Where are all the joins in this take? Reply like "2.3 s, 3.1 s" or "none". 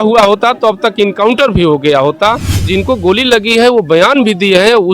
2.7 s